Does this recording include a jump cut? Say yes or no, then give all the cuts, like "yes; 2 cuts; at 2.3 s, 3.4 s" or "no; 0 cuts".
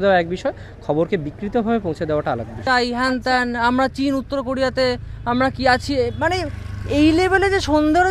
yes; 1 cut; at 2.6 s